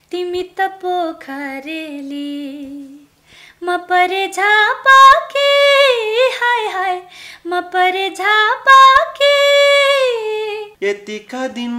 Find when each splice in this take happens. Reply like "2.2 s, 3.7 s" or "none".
10.7 s